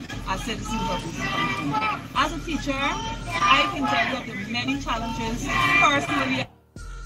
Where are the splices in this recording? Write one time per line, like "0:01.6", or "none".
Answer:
none